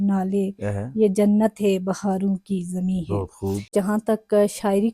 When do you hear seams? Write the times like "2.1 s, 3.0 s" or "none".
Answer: 3.7 s